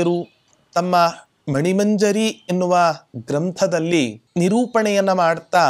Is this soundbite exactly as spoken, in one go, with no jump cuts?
no; 1 cut; at 4.2 s

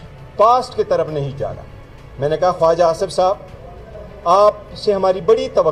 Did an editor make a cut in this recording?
no; 0 cuts

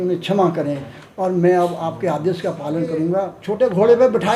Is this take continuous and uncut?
no; 1 cut; at 3.4 s

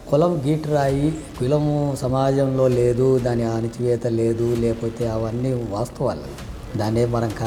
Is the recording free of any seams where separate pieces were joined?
yes; 0 cuts

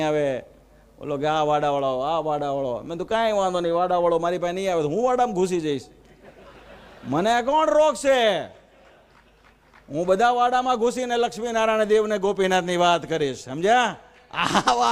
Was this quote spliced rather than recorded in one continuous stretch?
no; 0 cuts

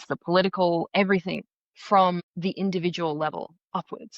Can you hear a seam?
yes; 1 cut; at 2.3 s

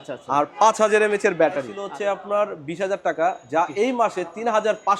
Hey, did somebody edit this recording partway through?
yes; 1 cut; at 1.8 s

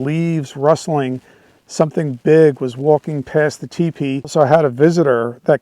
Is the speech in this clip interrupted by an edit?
yes; 1 cut; at 4.3 s

